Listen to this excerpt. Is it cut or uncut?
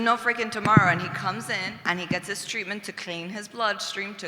cut